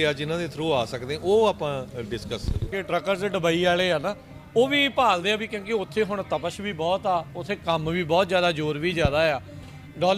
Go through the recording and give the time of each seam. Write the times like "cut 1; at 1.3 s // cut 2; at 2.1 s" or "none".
cut 1; at 2.7 s